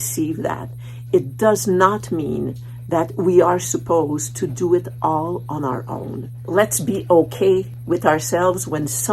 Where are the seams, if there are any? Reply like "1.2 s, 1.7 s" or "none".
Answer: 6.4 s